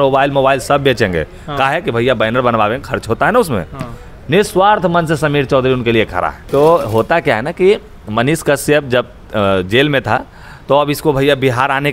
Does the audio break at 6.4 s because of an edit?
yes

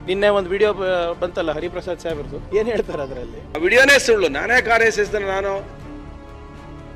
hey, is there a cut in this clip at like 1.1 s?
no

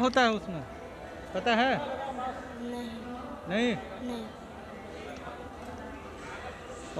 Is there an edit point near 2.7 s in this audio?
no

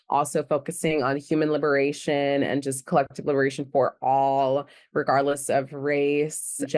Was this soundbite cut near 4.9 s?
no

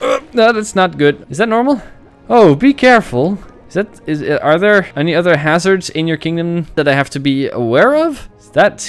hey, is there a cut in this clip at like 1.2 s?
yes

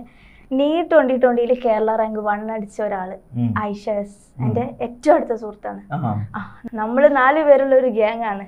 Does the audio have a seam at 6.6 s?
no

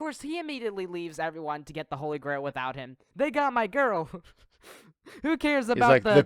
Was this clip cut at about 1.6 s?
no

